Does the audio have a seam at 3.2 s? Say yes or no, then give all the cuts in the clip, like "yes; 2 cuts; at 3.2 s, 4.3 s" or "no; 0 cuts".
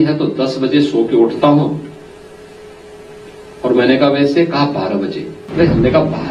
no; 2 cuts; at 1.3 s, 5.3 s